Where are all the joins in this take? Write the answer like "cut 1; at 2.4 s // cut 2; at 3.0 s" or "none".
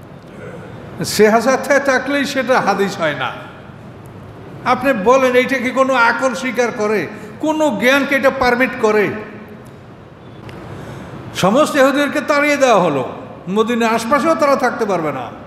cut 1; at 10.4 s